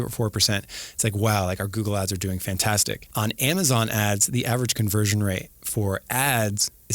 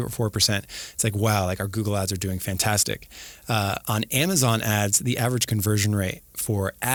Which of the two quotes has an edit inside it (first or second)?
first